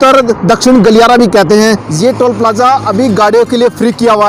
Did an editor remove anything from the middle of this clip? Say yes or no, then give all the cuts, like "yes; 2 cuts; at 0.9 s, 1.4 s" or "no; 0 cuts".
yes; 1 cut; at 1.9 s